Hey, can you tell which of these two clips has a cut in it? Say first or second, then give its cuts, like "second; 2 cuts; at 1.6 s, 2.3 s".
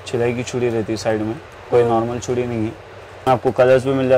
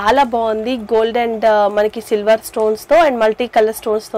first; 1 cut; at 3.3 s